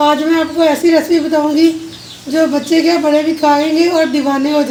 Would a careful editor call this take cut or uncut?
uncut